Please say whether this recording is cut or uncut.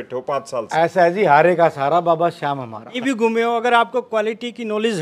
cut